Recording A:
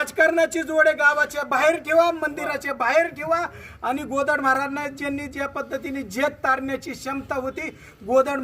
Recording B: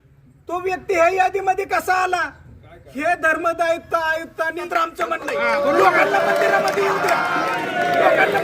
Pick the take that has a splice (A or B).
B